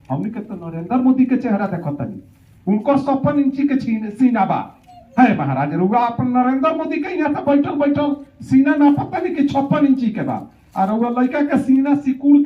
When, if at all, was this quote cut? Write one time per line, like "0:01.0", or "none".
none